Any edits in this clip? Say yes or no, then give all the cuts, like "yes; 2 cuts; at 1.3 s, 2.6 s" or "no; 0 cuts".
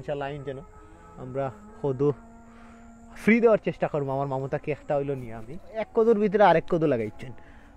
yes; 1 cut; at 5.9 s